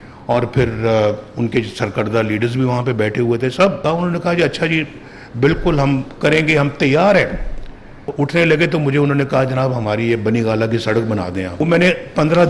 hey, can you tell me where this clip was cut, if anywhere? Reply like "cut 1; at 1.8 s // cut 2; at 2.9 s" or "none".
cut 1; at 3.8 s // cut 2; at 8.0 s // cut 3; at 11.6 s